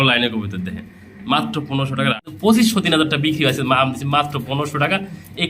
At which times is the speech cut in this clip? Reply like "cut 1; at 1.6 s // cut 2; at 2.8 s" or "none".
cut 1; at 2.3 s

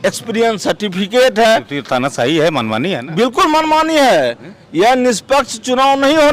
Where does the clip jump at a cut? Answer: none

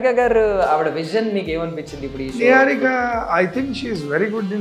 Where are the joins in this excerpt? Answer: none

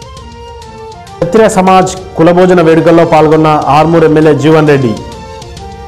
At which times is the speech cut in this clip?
cut 1; at 1.0 s

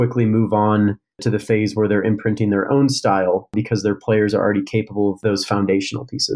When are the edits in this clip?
cut 1; at 1.2 s // cut 2; at 3.5 s // cut 3; at 5.2 s

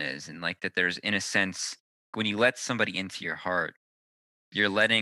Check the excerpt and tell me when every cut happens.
cut 1; at 2.1 s

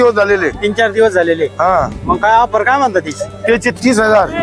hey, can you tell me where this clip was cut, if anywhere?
none

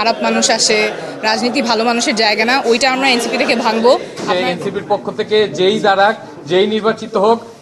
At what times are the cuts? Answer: cut 1; at 4.2 s

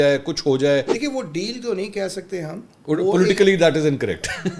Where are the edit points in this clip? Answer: cut 1; at 0.9 s

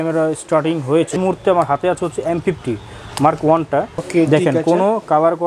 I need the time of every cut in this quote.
cut 1; at 1.2 s // cut 2; at 4.0 s

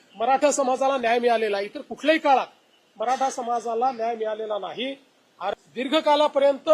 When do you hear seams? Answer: cut 1; at 5.5 s

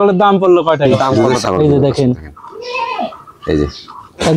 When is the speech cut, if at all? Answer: cut 1; at 1.1 s

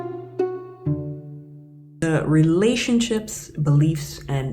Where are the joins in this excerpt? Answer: cut 1; at 2.0 s

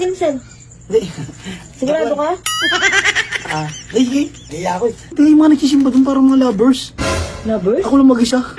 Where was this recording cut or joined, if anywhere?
cut 1; at 5.0 s

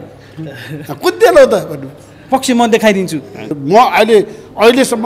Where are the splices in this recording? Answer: cut 1; at 3.5 s

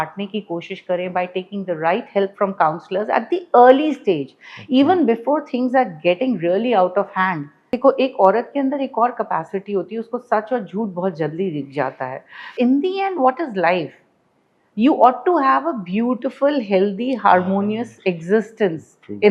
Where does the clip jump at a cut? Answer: cut 1; at 7.6 s // cut 2; at 12.5 s

